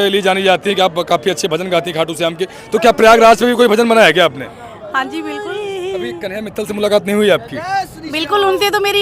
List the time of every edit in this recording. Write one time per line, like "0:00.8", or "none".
0:05.4
0:06.4